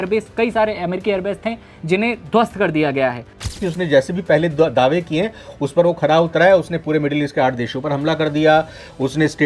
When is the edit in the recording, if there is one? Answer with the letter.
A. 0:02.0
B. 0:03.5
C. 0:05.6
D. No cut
B